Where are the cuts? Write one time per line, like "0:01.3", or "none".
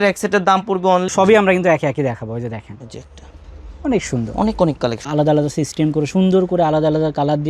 0:01.1
0:05.0